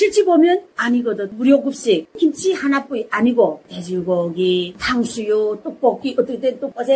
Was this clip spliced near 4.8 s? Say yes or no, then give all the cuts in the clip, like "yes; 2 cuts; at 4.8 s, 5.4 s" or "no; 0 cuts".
yes; 2 cuts; at 2.1 s, 4.8 s